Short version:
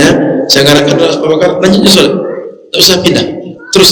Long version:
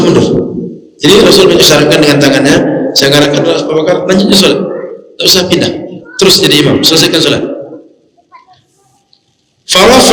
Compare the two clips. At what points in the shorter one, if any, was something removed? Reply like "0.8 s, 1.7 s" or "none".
none